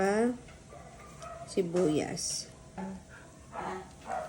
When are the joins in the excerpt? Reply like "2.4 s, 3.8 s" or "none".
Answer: 3.1 s